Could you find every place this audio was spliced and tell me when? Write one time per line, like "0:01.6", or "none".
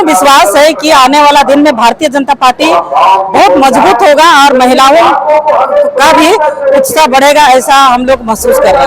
none